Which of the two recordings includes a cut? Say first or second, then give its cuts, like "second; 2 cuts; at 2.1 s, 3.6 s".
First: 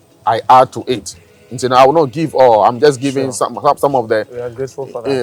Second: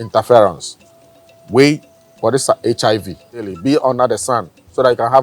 second; 1 cut; at 3.5 s